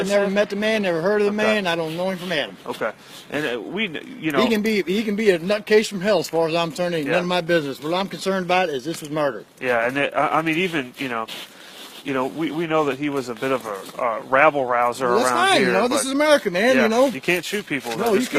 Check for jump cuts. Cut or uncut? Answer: uncut